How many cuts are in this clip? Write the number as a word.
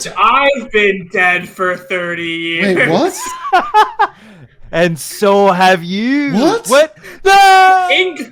zero